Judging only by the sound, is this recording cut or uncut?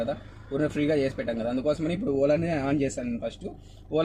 uncut